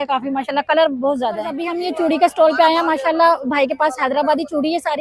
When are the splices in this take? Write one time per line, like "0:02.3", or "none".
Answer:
0:01.7